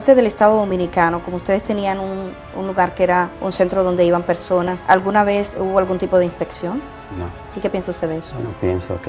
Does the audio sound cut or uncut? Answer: uncut